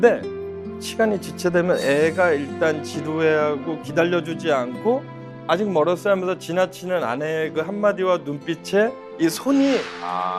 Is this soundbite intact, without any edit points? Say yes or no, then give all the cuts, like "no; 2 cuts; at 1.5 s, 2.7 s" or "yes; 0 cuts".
yes; 0 cuts